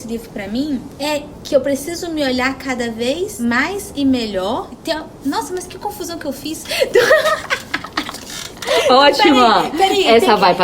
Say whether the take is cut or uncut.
cut